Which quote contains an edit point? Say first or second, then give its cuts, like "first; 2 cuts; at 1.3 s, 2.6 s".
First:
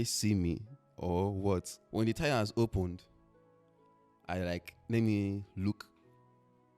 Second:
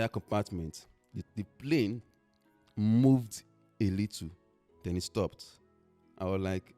first; 1 cut; at 1.8 s